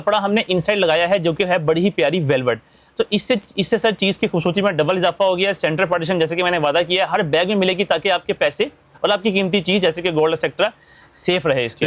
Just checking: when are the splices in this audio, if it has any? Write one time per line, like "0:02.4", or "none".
none